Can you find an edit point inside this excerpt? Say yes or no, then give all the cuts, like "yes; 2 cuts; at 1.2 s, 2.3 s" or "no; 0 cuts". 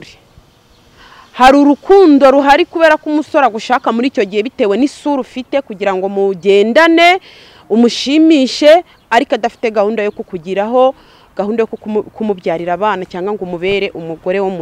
no; 0 cuts